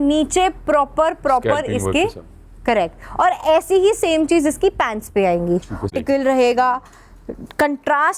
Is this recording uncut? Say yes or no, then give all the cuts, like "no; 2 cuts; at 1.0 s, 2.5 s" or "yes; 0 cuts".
no; 1 cut; at 5.9 s